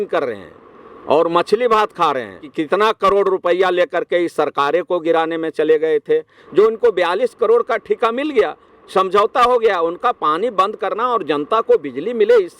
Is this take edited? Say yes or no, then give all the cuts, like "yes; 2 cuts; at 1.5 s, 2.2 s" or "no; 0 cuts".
yes; 2 cuts; at 2.5 s, 6.4 s